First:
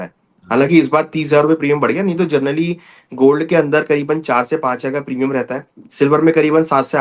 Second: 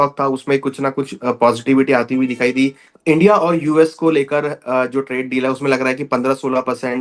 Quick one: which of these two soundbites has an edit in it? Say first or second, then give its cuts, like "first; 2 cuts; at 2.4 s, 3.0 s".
second; 1 cut; at 2.9 s